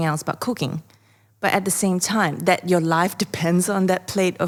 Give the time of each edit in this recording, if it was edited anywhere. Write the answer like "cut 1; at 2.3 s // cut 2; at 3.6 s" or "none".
none